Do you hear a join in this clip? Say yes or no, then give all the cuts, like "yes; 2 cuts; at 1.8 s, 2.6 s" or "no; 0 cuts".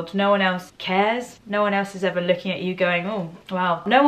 no; 0 cuts